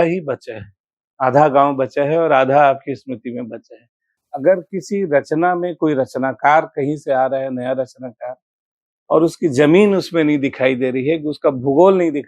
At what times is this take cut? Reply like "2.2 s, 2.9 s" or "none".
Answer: 4.2 s

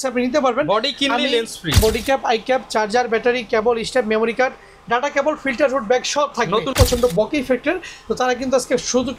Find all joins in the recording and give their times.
1.8 s, 6.7 s

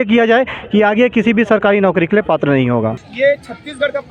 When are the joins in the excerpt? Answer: 3.1 s

